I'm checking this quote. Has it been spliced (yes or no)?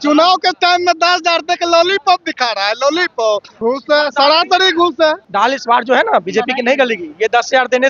yes